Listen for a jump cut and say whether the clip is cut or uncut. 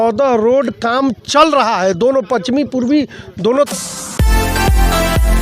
cut